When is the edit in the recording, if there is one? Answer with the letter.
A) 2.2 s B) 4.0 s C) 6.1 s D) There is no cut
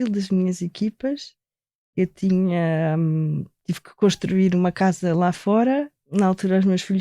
C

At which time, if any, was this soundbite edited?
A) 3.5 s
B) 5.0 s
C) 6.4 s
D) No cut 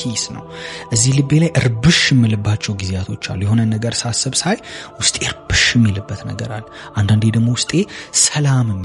D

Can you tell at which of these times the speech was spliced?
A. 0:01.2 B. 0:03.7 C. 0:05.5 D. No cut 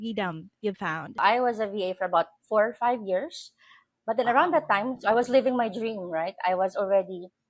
A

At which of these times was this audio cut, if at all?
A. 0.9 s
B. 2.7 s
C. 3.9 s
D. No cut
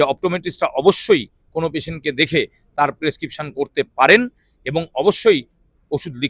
D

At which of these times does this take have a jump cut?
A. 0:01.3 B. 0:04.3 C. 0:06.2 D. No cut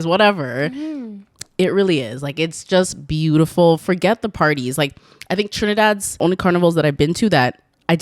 C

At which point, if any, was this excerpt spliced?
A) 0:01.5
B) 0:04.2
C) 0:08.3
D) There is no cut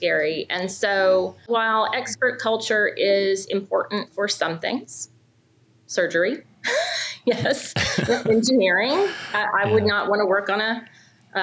A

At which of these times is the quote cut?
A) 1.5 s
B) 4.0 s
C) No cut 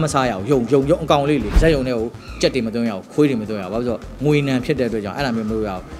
A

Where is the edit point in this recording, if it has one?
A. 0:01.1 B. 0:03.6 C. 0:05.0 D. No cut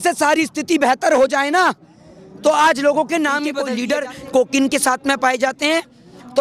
B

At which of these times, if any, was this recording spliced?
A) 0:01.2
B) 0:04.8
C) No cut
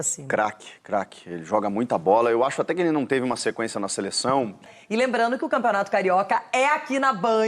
B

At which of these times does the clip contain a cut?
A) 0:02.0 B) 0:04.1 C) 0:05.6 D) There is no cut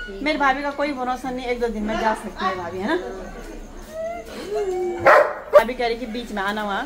C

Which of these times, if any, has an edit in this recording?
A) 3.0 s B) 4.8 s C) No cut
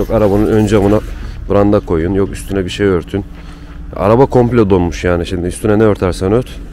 C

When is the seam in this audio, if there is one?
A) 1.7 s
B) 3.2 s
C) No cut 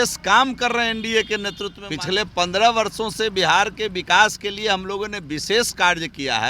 A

